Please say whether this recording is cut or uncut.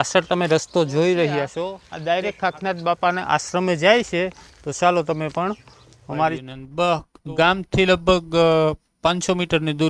cut